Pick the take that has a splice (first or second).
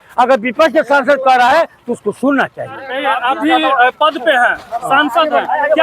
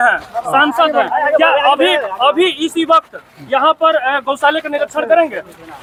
first